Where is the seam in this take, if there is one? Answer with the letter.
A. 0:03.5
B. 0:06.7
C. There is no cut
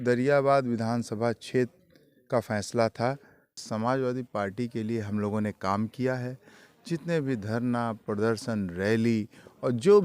A